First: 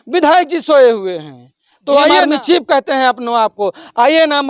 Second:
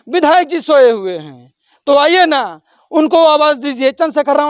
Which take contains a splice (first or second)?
first